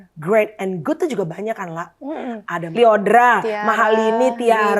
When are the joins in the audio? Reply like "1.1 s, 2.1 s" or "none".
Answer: 2.6 s